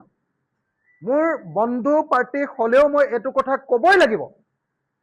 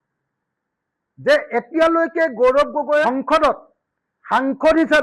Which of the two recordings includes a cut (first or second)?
second